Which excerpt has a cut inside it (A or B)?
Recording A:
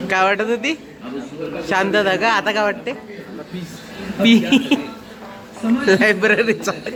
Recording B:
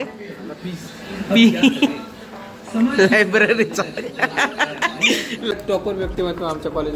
B